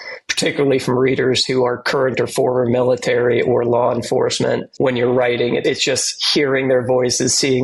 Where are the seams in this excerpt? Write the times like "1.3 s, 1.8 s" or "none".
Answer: 4.7 s, 5.6 s